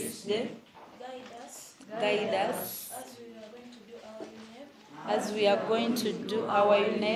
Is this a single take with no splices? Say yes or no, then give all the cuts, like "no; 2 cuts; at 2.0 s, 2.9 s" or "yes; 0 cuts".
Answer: yes; 0 cuts